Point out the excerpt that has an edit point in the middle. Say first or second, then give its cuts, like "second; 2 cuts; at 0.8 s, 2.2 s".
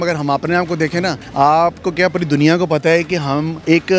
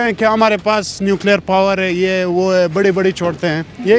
first; 1 cut; at 1.2 s